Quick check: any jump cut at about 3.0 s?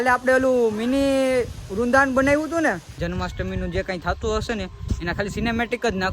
yes; 1 cut; at 3.0 s

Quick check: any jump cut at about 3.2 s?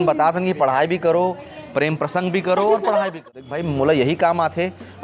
yes; 1 cut; at 3.2 s

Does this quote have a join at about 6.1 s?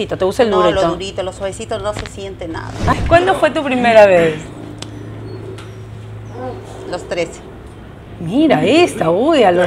no; 1 cut; at 2.9 s

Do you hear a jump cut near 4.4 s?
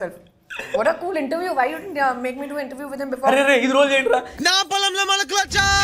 no; 0 cuts

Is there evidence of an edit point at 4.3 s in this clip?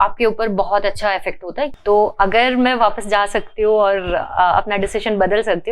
no; 1 cut; at 1.7 s

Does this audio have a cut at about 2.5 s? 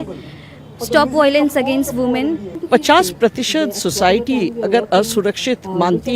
yes; 1 cut; at 2.5 s

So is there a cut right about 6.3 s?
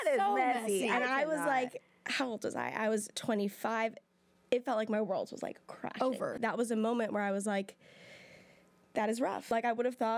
yes; 2 cuts; at 6.3 s, 9.4 s

